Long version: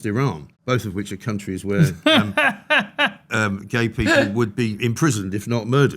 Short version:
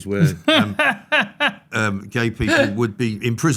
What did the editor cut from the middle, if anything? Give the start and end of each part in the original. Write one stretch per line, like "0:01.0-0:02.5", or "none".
none